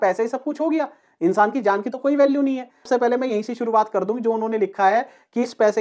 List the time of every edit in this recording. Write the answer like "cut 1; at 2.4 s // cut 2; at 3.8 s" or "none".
cut 1; at 2.9 s